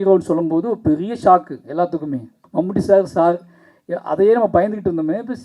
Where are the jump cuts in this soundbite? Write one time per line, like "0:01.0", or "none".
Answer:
0:02.4